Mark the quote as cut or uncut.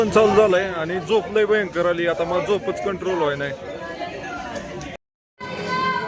cut